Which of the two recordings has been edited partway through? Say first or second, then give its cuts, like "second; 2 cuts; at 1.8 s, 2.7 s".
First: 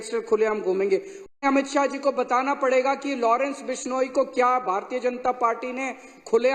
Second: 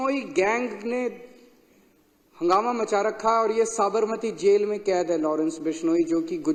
first; 1 cut; at 1.3 s